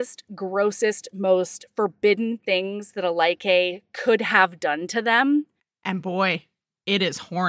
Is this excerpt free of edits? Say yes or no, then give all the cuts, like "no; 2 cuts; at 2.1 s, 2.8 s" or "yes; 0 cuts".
yes; 0 cuts